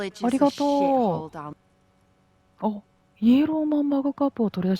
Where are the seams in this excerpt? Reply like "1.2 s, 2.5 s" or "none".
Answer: 1.6 s